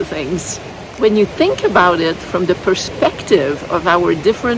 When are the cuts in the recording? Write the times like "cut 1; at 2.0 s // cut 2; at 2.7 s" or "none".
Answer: cut 1; at 0.9 s